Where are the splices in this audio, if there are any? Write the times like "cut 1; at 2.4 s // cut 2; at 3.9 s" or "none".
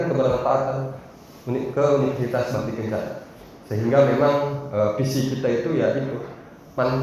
none